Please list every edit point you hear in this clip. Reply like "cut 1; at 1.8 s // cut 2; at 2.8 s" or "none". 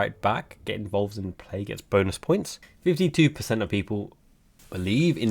cut 1; at 2.6 s